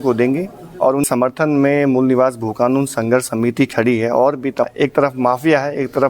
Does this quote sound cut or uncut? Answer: cut